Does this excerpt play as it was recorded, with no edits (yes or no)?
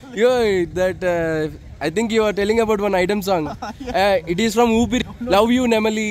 no